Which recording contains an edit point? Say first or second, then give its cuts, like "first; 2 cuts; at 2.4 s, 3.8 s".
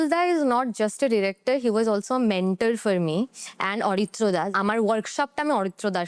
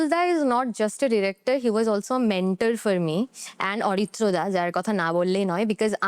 first; 1 cut; at 4.5 s